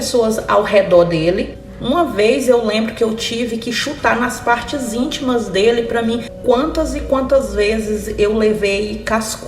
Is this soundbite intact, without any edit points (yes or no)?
no